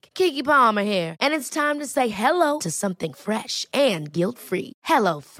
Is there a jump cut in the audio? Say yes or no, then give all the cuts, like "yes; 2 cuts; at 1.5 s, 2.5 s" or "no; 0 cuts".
no; 0 cuts